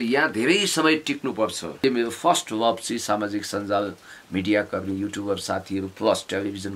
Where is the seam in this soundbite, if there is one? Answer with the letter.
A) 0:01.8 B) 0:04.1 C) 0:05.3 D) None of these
A